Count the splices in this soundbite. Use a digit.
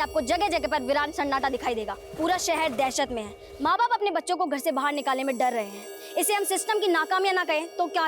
1